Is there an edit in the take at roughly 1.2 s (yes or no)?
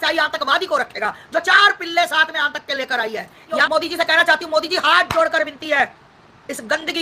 no